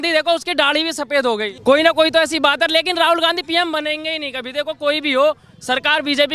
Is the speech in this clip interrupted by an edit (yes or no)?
no